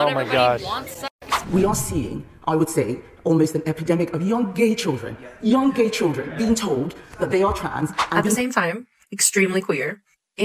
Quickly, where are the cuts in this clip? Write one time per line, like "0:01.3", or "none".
0:01.3
0:08.4